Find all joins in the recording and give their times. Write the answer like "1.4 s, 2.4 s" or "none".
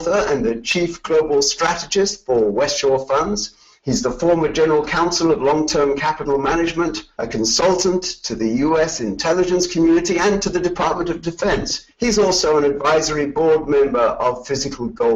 13.9 s